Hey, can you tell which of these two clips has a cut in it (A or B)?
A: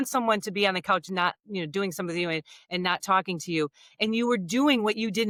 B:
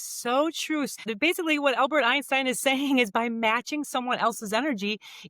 B